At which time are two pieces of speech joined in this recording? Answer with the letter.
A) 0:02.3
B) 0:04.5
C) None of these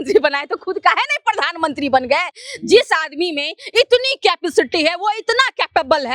C